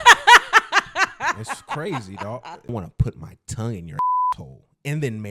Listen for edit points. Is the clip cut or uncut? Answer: cut